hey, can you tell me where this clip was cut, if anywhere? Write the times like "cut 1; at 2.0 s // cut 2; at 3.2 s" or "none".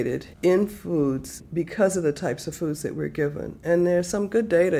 cut 1; at 1.4 s